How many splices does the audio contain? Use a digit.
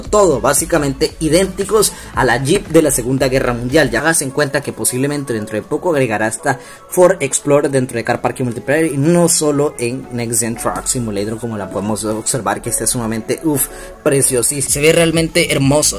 2